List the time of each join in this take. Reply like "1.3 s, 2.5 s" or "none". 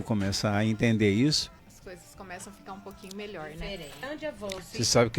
1.6 s, 4.0 s